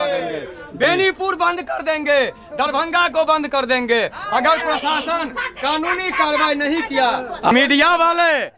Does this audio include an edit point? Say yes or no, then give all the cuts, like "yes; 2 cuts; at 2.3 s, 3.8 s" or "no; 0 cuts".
yes; 1 cut; at 7.5 s